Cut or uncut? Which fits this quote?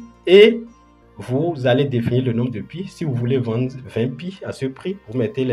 uncut